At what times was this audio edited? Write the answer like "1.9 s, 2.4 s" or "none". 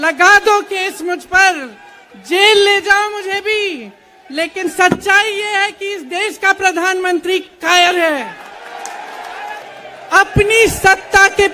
9.6 s